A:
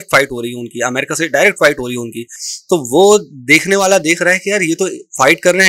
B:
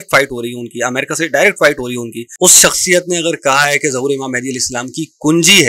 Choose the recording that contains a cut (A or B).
B